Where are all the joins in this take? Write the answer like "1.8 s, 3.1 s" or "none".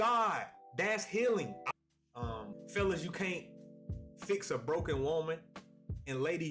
1.5 s